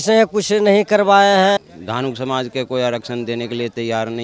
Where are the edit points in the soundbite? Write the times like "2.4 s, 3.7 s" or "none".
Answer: 1.6 s